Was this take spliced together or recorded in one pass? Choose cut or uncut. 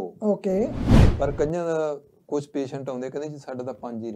cut